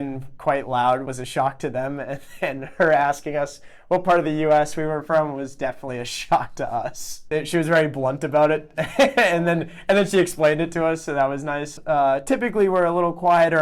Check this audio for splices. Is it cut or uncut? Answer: cut